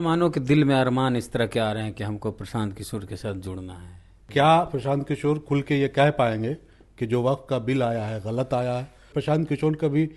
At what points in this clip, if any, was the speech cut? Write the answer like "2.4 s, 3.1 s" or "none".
4.2 s, 9.1 s